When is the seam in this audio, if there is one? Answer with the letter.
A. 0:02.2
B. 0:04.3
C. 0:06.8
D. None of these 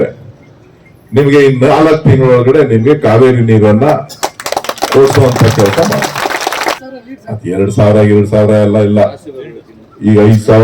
C